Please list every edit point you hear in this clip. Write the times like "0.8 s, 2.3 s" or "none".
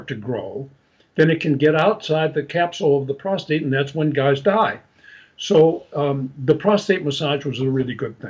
none

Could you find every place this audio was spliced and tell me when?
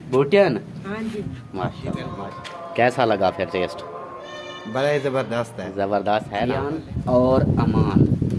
2.1 s, 6.4 s

